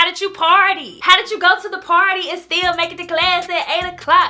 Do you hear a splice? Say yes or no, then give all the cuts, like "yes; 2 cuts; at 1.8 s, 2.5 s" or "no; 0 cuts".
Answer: yes; 1 cut; at 0.9 s